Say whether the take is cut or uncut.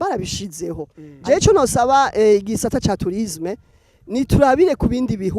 cut